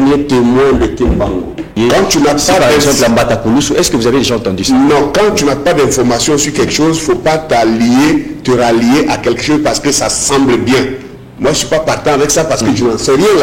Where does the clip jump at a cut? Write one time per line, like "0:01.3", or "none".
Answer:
0:01.7